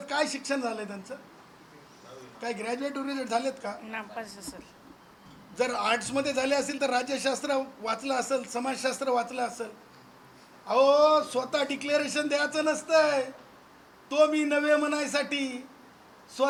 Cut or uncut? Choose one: uncut